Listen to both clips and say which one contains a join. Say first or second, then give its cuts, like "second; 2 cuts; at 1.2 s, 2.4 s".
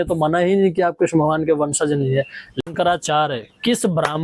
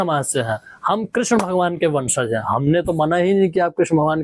first; 1 cut; at 2.6 s